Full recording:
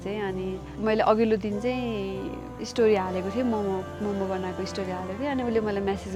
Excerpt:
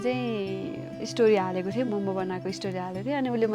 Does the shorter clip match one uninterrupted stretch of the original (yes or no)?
no